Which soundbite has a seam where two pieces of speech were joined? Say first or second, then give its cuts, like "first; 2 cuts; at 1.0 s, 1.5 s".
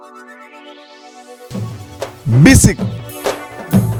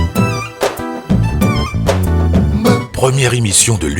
second; 1 cut; at 2.9 s